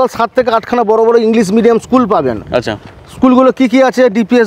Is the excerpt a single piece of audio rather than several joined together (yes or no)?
yes